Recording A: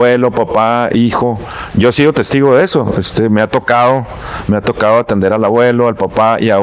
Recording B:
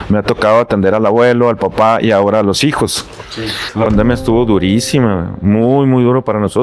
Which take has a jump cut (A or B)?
B